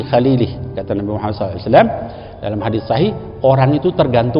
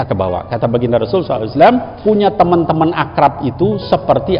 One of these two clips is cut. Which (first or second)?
second